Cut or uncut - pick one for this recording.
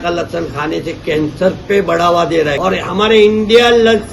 cut